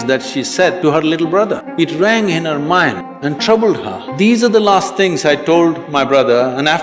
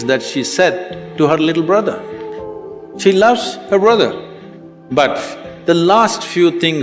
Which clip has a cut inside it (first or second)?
first